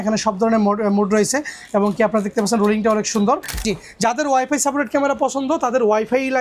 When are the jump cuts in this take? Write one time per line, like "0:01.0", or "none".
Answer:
0:03.5

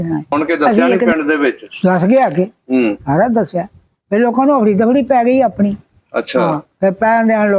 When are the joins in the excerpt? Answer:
0:01.1

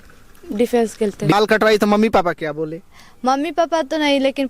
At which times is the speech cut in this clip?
0:01.3

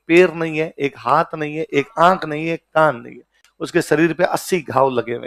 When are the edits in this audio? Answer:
none

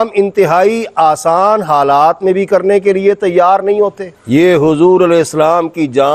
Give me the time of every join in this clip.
none

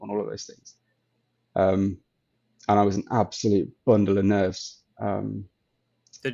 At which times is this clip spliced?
none

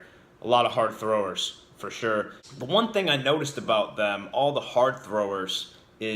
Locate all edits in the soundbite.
0:02.4

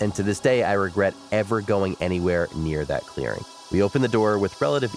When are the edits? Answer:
0:03.5

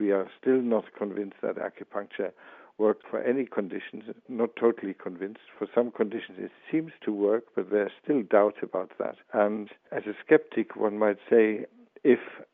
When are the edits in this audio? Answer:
none

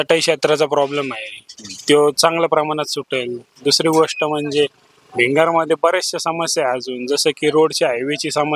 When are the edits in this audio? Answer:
none

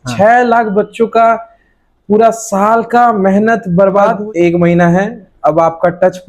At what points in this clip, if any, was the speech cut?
0:04.1

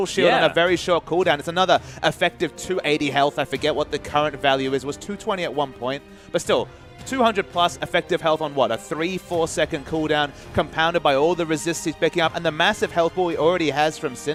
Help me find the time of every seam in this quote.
none

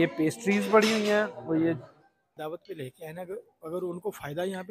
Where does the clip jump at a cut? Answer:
0:02.4

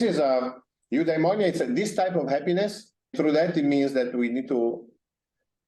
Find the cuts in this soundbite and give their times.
0:03.1

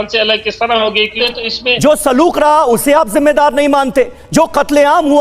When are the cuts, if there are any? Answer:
0:01.2

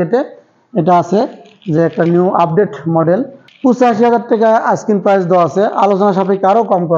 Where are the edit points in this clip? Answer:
0:03.4

